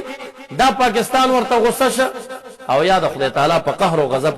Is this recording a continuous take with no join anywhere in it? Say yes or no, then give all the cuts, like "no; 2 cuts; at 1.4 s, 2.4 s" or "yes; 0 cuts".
yes; 0 cuts